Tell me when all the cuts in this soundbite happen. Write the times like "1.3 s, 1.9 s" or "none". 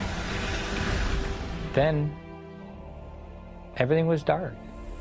2.2 s